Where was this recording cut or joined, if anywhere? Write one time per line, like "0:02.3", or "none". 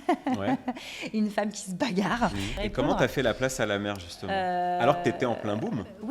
0:02.5